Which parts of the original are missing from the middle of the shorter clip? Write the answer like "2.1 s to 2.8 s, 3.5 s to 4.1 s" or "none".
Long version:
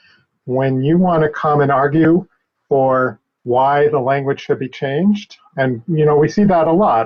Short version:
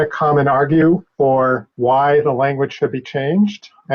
2.7 s to 3.1 s